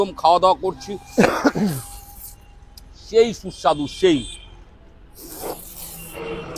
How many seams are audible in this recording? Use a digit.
0